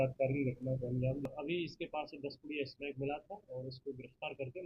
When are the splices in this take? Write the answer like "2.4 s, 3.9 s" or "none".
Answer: 1.3 s